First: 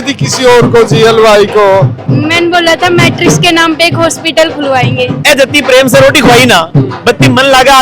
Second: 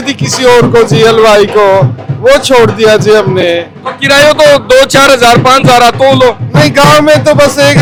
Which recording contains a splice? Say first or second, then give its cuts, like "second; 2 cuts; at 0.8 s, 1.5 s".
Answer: first; 2 cuts; at 2.0 s, 5.2 s